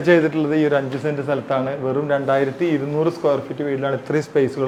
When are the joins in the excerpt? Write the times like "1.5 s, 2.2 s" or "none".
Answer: none